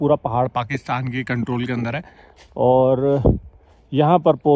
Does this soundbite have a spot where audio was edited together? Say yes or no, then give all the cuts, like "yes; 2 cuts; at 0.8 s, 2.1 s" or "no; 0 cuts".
no; 0 cuts